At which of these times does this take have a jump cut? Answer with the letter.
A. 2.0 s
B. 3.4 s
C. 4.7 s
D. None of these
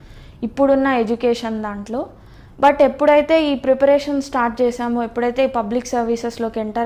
D